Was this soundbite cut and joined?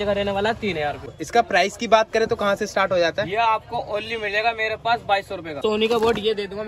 yes; 2 cuts; at 1.0 s, 5.6 s

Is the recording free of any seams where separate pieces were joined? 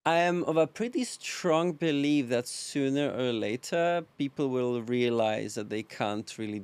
yes; 0 cuts

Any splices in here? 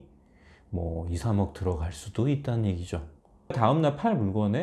yes; 1 cut; at 3.6 s

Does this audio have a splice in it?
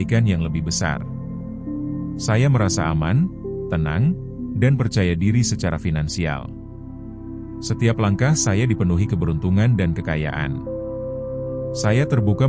yes; 2 cuts; at 1.3 s, 2.3 s

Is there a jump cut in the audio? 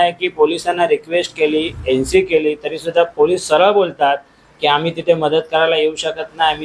no; 0 cuts

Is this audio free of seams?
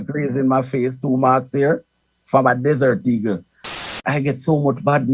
no; 1 cut; at 3.8 s

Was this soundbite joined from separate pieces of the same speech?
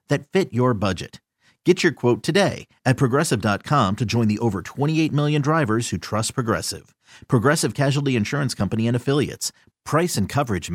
no; 0 cuts

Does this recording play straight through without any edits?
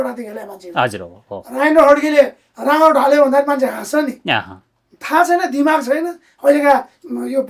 yes; 0 cuts

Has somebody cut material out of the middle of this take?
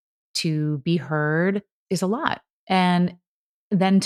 yes; 1 cut; at 2.2 s

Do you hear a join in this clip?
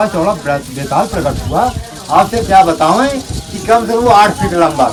no; 0 cuts

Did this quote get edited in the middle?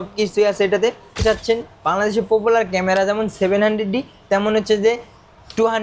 yes; 1 cut; at 1.2 s

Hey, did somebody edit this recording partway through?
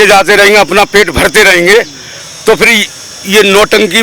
no; 0 cuts

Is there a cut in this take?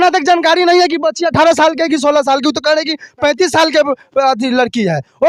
no; 0 cuts

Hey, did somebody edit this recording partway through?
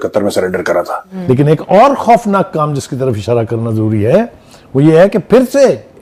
yes; 1 cut; at 1.0 s

